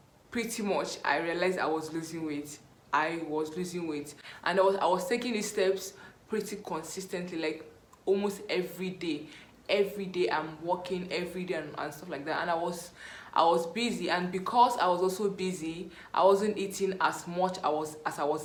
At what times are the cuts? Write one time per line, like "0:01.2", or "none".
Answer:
none